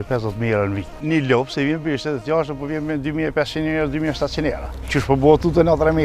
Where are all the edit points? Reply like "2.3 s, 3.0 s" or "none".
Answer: 1.0 s